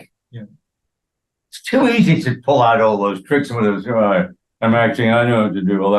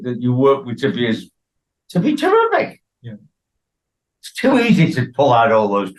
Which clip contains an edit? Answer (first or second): first